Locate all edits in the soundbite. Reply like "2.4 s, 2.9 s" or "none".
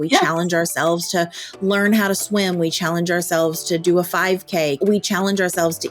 4.8 s